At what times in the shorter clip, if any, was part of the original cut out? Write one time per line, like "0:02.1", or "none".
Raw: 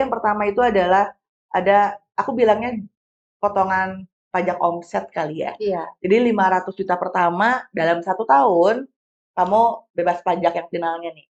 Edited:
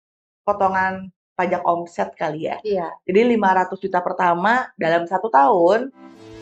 none